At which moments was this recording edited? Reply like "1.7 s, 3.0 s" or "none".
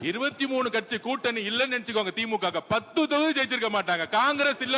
none